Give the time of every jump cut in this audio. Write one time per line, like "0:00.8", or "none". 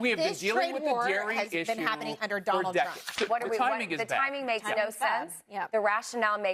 0:03.3